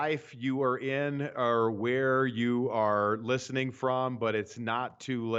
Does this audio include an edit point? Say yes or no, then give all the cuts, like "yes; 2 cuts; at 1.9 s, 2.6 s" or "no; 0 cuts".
no; 0 cuts